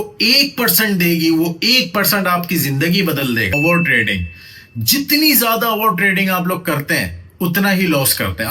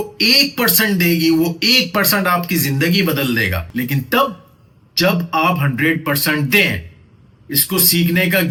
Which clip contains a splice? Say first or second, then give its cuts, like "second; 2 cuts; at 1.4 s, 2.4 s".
first; 1 cut; at 3.5 s